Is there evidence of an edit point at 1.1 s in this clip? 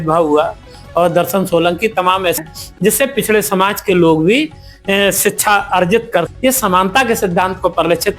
no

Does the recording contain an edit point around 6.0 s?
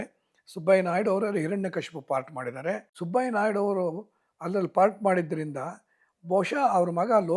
no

